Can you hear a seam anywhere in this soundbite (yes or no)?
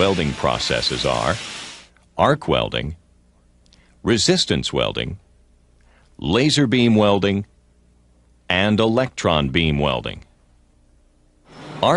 no